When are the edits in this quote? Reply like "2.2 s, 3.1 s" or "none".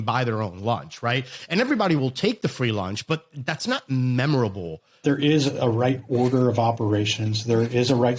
5.0 s